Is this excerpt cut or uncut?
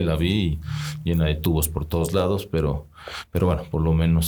uncut